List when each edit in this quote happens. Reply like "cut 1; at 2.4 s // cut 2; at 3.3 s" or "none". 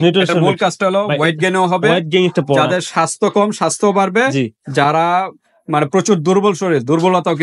none